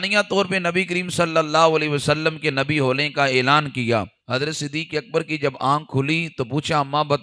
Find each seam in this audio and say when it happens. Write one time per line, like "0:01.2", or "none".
0:04.2